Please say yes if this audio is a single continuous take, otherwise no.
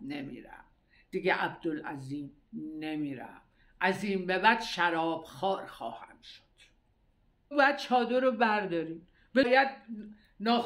no